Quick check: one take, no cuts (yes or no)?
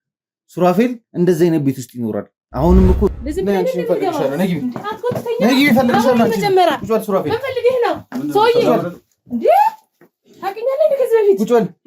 no